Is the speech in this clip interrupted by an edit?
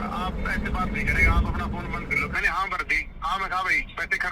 yes; 1 cut; at 2.3 s

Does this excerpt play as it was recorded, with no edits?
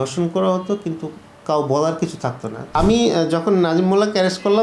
no; 1 cut; at 2.7 s

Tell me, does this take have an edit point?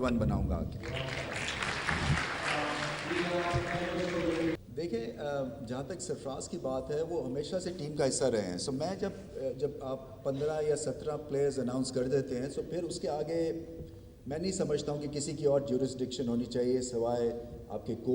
no; 0 cuts

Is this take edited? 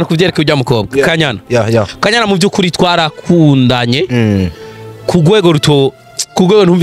no; 0 cuts

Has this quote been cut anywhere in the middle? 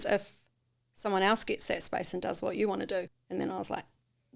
yes; 1 cut; at 3.2 s

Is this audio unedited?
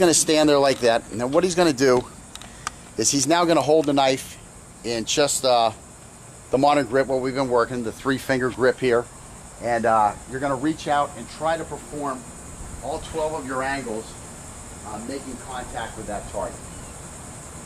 no; 1 cut; at 13.6 s

